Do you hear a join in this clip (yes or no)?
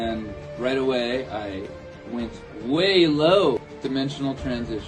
yes